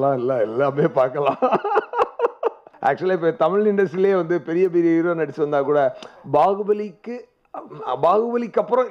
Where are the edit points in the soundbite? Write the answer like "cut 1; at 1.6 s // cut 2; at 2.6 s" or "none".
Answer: cut 1; at 2.7 s